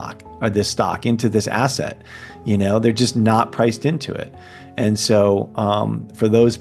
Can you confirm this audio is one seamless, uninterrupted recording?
yes; 0 cuts

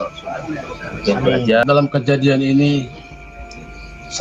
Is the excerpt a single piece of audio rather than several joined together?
no; 1 cut; at 1.6 s

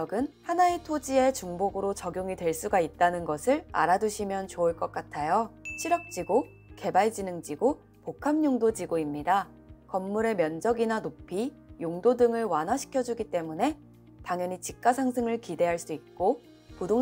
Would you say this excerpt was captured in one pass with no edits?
no; 1 cut; at 5.7 s

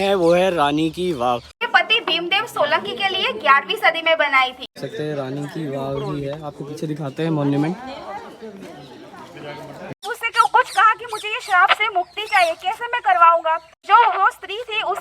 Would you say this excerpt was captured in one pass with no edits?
no; 4 cuts; at 1.5 s, 4.8 s, 10.0 s, 13.9 s

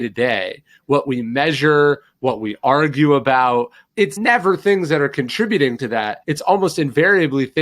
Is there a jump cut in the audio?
yes; 2 cuts; at 3.8 s, 6.2 s

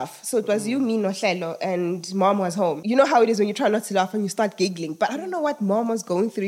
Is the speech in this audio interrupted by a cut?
yes; 1 cut; at 2.8 s

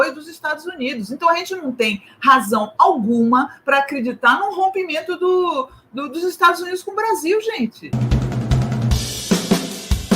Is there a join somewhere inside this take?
yes; 1 cut; at 7.8 s

